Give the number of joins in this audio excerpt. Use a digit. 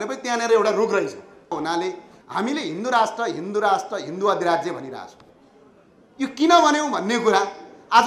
1